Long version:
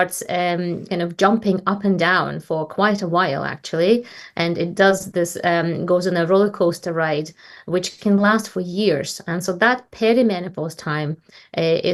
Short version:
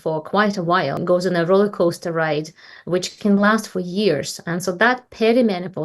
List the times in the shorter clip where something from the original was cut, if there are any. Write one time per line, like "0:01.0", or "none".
0:01.0